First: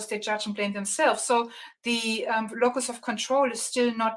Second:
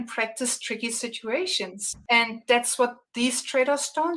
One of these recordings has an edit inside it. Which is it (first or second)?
second